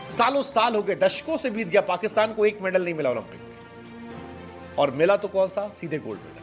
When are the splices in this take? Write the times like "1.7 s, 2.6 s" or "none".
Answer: none